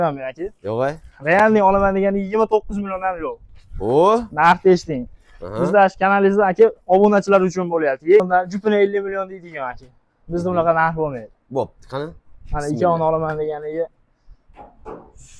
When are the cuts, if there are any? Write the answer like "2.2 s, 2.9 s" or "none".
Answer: 8.2 s